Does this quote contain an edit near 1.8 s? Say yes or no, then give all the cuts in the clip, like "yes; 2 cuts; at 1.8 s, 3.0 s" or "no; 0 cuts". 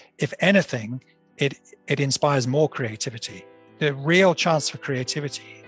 no; 1 cut; at 3.7 s